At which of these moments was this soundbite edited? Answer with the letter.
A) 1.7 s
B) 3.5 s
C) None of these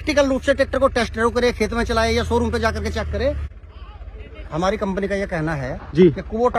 B